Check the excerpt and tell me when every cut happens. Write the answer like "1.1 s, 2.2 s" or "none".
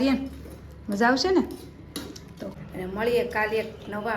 2.4 s